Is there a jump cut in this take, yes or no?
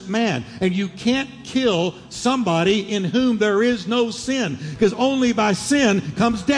no